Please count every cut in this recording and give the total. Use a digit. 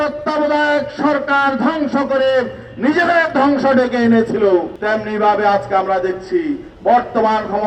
1